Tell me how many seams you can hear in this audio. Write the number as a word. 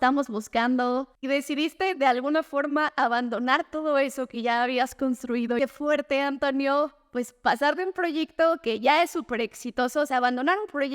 two